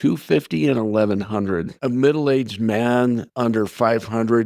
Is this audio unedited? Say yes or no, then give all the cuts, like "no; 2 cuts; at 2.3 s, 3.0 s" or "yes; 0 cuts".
no; 2 cuts; at 1.7 s, 3.3 s